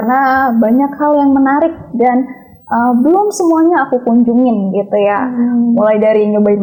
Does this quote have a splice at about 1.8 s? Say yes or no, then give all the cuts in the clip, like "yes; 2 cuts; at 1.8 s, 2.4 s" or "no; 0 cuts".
no; 0 cuts